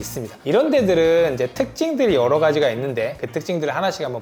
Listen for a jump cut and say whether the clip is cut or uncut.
uncut